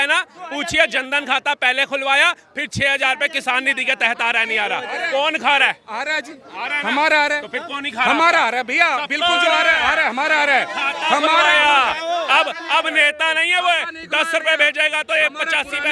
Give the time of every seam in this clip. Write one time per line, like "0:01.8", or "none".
none